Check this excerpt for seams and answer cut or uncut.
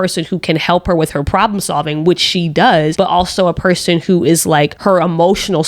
cut